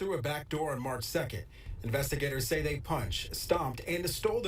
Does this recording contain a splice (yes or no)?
no